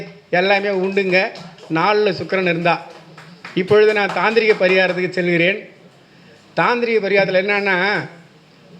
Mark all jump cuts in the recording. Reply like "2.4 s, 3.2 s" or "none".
none